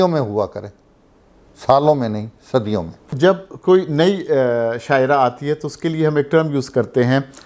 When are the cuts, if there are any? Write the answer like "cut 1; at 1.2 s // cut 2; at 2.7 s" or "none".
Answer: cut 1; at 3.1 s